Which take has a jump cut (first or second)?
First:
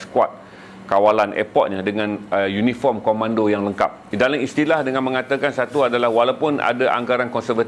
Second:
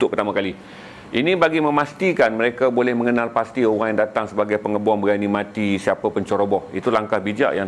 first